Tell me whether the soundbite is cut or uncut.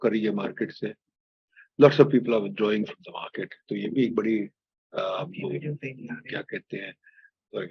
uncut